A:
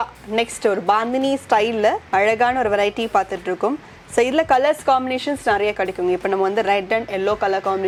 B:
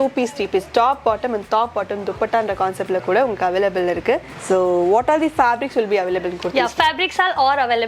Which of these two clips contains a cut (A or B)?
B